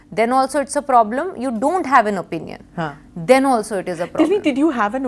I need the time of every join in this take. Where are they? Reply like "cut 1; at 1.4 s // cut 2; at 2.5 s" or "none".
none